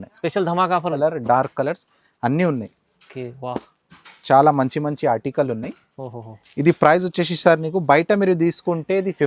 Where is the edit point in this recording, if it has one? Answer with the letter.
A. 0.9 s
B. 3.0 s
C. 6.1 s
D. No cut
A